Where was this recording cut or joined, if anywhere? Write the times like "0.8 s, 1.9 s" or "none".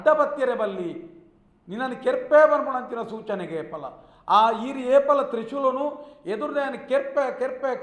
none